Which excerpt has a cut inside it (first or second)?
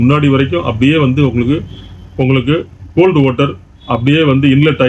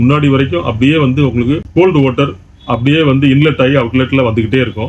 second